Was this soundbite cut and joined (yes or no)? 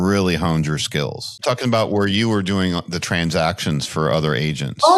yes